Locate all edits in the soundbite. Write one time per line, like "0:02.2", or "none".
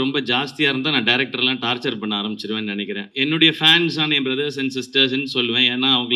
0:03.1